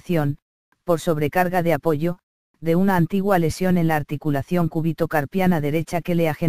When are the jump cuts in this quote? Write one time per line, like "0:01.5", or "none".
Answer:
none